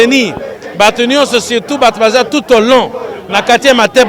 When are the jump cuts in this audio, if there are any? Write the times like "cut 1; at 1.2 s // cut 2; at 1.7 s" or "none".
none